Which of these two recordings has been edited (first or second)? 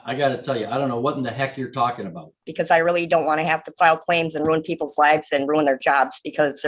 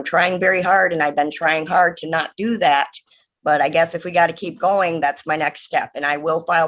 first